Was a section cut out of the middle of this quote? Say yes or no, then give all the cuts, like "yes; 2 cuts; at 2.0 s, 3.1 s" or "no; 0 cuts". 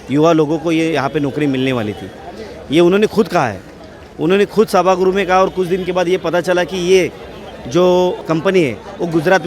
yes; 1 cut; at 8.2 s